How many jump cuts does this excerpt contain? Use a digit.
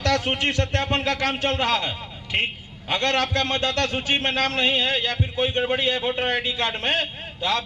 0